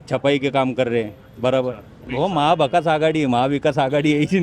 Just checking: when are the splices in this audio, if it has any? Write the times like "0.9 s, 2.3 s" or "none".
2.0 s